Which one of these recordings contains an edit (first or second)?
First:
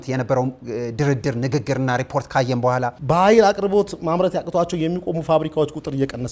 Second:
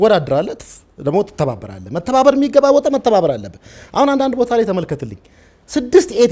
first